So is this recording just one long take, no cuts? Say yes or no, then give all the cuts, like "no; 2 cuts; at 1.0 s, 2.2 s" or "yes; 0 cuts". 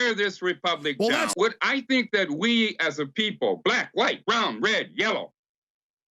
no; 1 cut; at 1.3 s